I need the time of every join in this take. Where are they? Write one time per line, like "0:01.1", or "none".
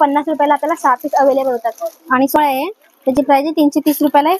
0:02.4